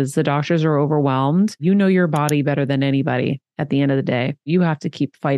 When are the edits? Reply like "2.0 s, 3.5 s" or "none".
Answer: 1.6 s, 4.5 s